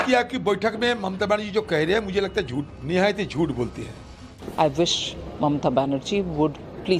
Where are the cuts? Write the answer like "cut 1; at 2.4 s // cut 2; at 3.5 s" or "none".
cut 1; at 2.8 s // cut 2; at 4.2 s